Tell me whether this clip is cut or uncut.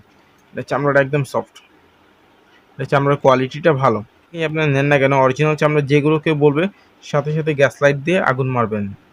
cut